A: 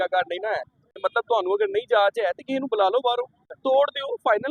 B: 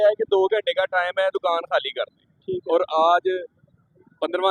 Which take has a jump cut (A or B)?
A